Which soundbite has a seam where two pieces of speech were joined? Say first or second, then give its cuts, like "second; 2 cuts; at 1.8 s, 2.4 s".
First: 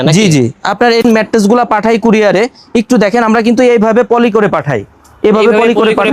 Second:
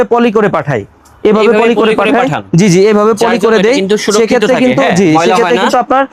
first; 1 cut; at 1.0 s